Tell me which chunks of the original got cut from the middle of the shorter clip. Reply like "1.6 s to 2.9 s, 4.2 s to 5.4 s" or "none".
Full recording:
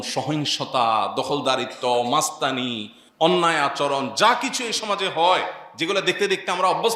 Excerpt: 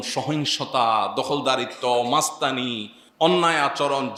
none